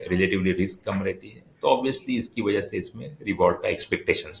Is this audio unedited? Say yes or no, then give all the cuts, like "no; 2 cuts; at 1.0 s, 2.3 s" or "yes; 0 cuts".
yes; 0 cuts